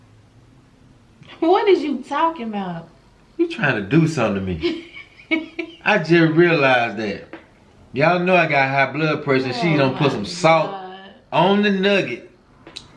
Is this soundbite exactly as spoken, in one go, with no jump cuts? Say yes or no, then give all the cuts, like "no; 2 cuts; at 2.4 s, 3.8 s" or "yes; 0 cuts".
yes; 0 cuts